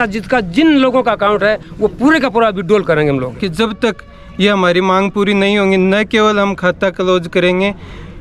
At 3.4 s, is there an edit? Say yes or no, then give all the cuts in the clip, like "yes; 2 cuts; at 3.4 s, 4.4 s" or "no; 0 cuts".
yes; 1 cut; at 3.4 s